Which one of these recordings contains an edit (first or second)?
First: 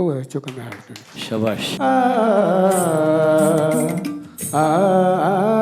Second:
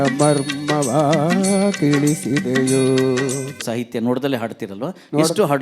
first